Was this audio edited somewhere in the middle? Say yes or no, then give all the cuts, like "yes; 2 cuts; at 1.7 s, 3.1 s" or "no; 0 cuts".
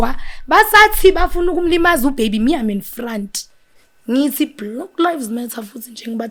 no; 0 cuts